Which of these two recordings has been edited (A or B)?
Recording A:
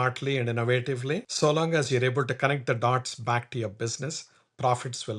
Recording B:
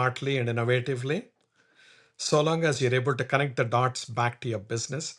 A